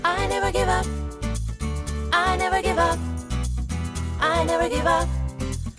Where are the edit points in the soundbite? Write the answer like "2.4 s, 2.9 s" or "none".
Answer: none